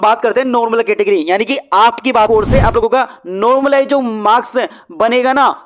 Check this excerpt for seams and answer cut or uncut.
cut